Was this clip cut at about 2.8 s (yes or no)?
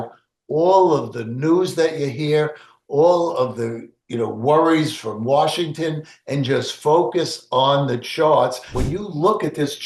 no